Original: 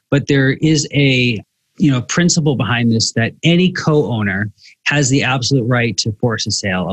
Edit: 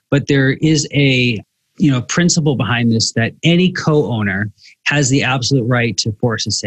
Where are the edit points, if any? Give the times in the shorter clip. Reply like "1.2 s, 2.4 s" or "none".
none